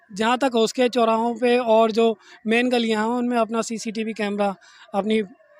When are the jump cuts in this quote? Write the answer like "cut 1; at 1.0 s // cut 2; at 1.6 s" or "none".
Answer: none